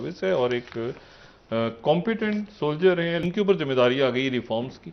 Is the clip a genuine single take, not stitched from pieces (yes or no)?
yes